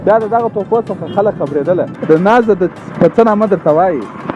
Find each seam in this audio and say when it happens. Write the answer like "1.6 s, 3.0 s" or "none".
1.9 s